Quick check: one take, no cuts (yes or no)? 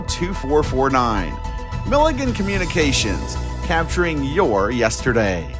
yes